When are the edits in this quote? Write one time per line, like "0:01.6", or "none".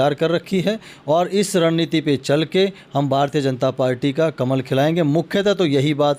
none

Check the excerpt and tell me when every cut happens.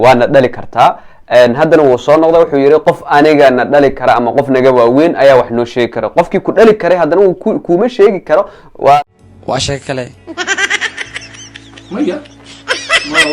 0:09.0

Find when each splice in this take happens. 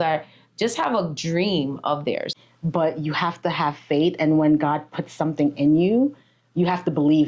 0:02.3

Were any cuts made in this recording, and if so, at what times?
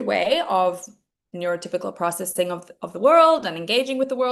none

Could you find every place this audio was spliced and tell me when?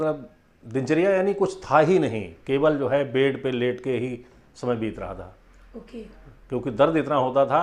none

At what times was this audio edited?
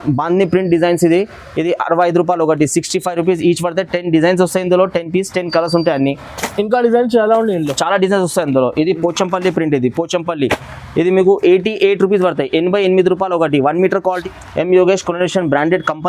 0:14.2

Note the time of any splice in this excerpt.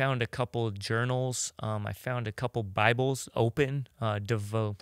0:02.7

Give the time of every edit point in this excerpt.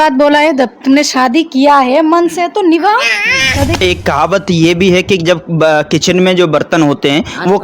0:03.8

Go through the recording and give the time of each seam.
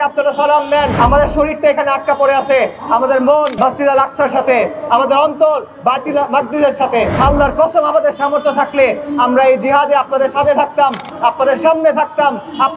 0:00.9
0:03.5
0:07.1

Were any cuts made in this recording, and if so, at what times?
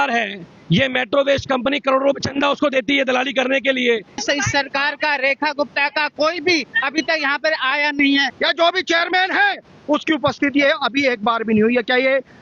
0:04.2
0:08.3

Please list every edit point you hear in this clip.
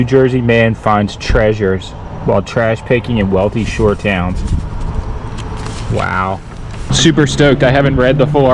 0:06.9

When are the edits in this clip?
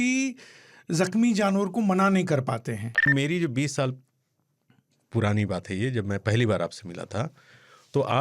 0:03.1

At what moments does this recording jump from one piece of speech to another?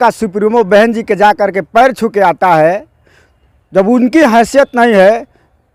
none

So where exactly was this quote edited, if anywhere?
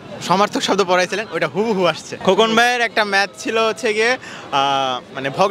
0:02.2

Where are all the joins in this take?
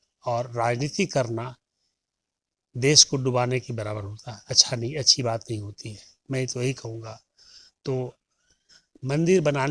none

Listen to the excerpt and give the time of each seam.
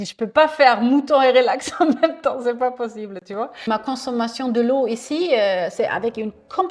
0:03.7

